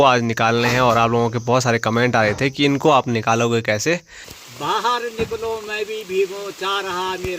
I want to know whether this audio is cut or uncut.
cut